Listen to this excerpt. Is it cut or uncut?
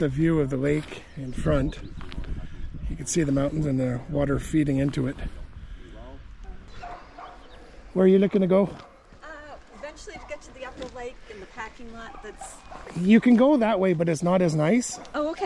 cut